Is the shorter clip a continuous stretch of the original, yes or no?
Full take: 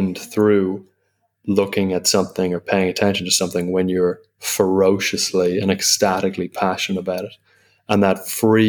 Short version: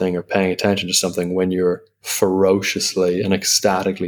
yes